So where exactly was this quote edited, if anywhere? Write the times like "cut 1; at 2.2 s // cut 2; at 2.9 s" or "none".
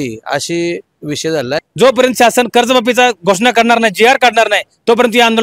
cut 1; at 1.7 s